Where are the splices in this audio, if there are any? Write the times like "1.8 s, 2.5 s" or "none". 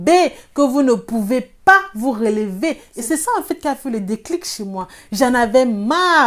2.9 s